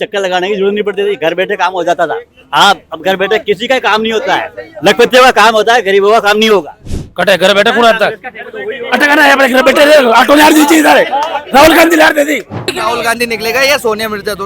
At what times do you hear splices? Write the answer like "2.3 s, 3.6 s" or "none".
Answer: 12.7 s